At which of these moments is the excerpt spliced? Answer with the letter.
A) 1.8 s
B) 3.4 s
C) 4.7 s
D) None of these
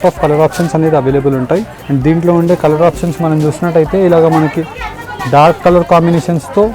A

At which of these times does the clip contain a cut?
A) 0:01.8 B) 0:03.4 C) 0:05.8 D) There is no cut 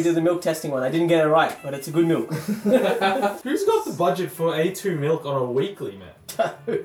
B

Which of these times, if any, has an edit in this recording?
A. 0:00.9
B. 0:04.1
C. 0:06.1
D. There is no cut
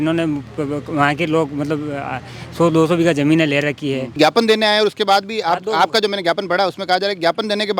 B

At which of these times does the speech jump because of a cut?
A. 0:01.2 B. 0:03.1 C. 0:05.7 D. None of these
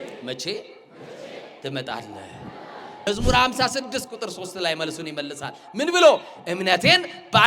B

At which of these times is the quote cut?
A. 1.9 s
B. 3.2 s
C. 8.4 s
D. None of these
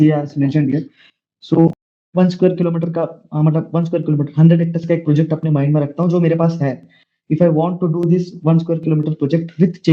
A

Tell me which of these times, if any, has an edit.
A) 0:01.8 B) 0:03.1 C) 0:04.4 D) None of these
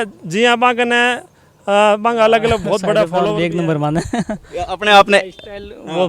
B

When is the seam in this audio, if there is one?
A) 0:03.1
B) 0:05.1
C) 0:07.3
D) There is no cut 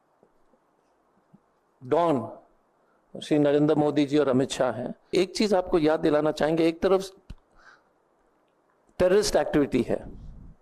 B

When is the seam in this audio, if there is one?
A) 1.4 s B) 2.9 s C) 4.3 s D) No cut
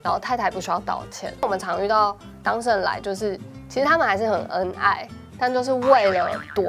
A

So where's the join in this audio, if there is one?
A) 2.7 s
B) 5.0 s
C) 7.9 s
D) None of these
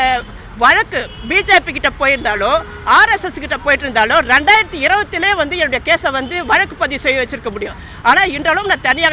D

